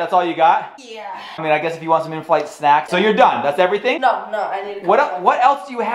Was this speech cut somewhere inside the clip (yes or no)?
yes